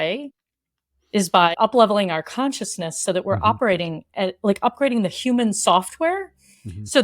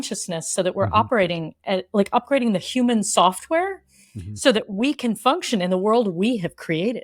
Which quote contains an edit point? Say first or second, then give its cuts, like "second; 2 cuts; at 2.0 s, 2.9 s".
first; 1 cut; at 1.5 s